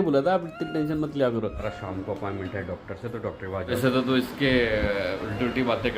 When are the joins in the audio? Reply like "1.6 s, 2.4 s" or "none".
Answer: 1.7 s, 3.7 s